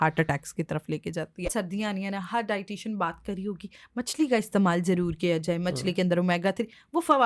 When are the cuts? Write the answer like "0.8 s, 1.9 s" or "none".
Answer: 1.5 s